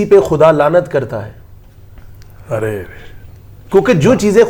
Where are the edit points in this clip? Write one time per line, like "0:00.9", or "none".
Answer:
none

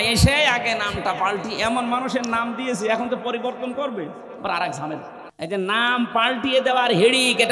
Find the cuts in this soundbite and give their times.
0:05.2

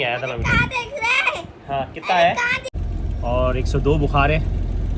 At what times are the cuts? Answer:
0:02.6

